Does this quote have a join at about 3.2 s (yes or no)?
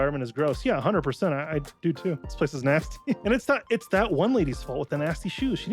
yes